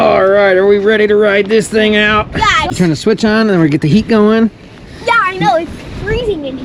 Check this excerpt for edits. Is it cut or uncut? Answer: cut